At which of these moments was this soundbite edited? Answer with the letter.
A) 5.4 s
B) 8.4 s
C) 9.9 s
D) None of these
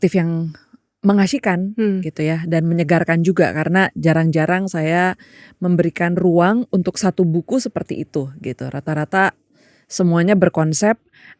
D